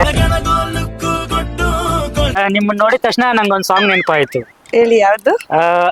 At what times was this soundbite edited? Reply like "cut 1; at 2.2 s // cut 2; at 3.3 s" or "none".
cut 1; at 2.4 s